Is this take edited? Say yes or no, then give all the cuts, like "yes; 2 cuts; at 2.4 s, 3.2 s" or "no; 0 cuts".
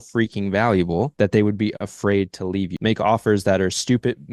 yes; 2 cuts; at 1.1 s, 2.7 s